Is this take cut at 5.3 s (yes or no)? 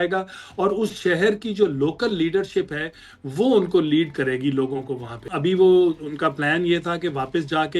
yes